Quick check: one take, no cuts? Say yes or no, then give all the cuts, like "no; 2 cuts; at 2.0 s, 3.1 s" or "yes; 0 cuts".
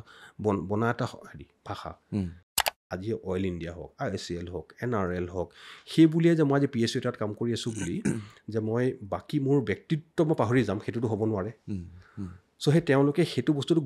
no; 1 cut; at 2.7 s